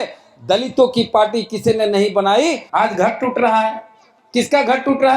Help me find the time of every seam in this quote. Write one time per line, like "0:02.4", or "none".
0:02.6